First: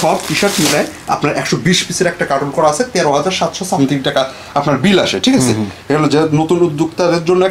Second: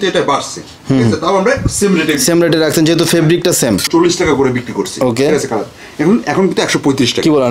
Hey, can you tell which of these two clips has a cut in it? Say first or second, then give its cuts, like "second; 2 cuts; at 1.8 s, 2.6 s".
second; 1 cut; at 3.9 s